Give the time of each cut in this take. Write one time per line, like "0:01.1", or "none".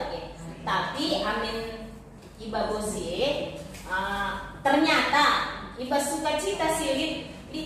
none